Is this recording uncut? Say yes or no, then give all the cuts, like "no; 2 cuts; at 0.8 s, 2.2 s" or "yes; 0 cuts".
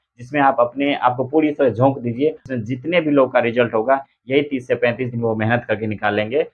no; 1 cut; at 2.5 s